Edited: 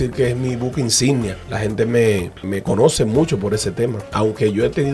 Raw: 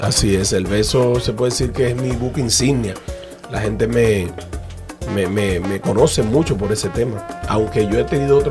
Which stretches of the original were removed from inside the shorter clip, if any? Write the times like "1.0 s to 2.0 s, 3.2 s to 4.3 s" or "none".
3.0 s to 3.5 s, 4.5 s to 5.6 s, 7.2 s to 7.4 s

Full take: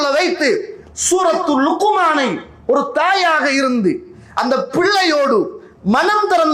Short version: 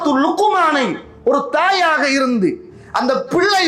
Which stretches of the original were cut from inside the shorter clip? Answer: none

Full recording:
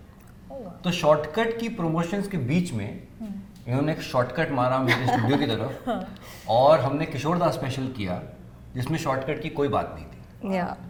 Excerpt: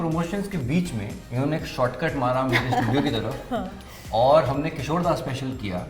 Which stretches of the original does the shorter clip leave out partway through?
3.0 s to 3.5 s

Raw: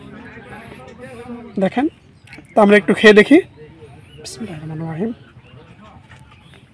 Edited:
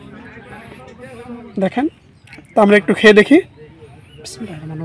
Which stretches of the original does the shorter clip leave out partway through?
none

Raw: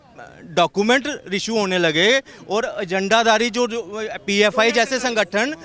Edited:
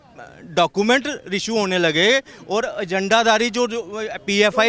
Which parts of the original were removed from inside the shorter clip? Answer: none

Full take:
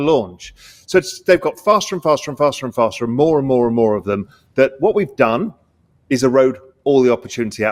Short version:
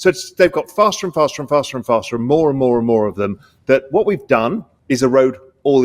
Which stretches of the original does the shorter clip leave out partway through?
5.6 s to 5.9 s

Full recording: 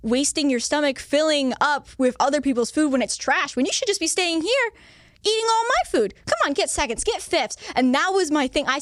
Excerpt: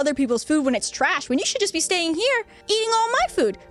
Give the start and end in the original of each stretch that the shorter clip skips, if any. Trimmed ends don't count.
4.8 s to 5.1 s

